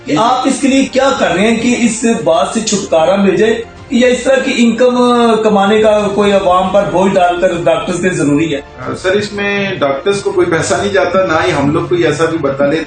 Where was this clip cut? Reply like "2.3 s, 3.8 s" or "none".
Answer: 8.8 s